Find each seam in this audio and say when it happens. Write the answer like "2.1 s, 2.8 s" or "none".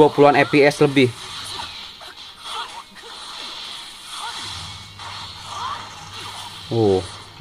none